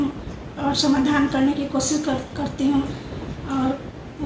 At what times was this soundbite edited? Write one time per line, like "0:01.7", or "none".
none